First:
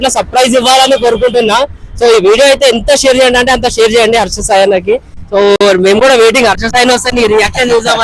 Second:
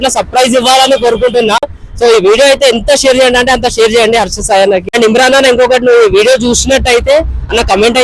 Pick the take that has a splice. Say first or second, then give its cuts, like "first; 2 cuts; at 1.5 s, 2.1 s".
second; 1 cut; at 4.8 s